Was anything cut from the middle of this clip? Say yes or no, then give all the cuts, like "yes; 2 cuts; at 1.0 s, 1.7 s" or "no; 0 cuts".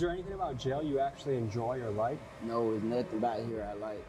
no; 0 cuts